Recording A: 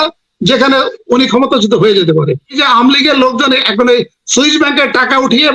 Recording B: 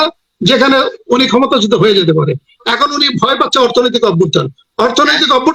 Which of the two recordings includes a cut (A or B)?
A